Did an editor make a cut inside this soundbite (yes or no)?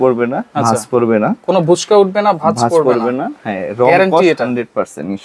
no